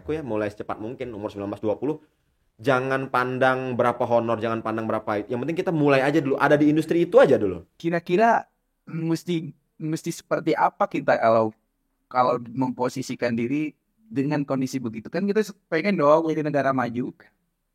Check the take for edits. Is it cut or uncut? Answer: cut